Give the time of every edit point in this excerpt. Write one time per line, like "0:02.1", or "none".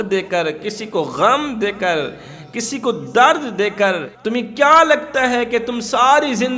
0:04.1